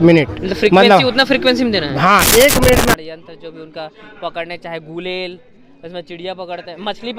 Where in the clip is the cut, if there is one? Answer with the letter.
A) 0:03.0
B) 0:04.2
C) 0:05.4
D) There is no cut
A